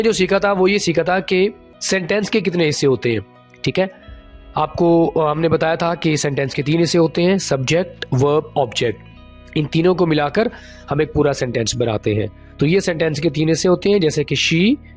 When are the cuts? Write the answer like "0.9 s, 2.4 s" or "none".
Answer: 1.7 s